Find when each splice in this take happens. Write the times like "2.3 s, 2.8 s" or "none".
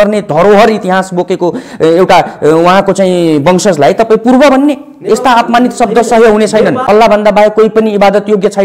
6.8 s